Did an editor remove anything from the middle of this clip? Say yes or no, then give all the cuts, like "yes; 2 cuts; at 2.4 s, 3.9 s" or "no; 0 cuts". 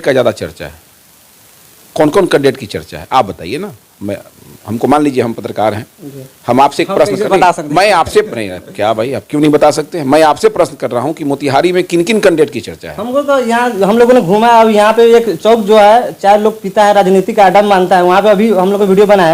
no; 0 cuts